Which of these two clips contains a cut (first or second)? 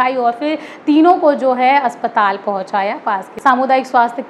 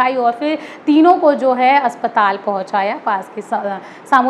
first